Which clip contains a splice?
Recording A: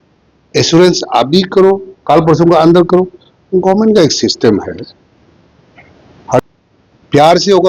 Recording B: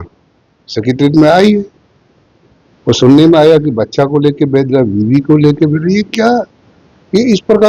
A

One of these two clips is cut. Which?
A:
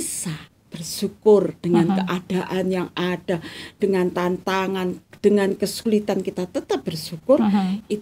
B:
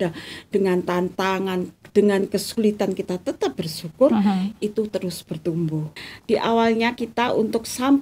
B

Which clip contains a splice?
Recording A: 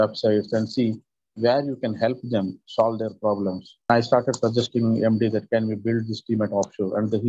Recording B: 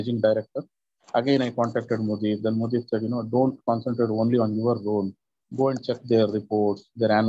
A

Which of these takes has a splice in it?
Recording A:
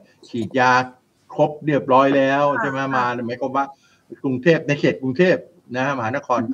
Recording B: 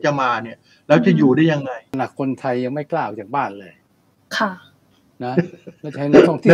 B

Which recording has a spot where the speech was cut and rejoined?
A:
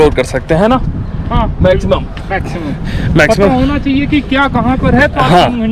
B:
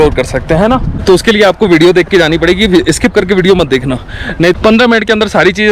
B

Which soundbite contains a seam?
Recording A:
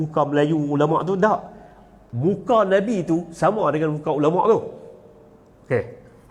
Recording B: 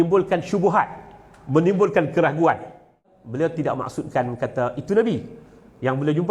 B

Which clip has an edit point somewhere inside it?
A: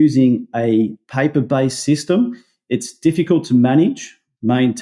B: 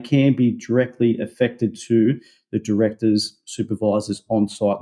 A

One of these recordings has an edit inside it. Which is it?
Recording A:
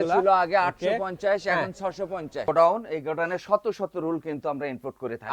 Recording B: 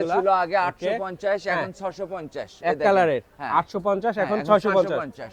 A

